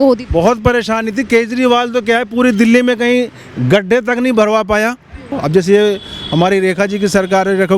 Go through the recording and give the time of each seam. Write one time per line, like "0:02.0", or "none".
0:05.4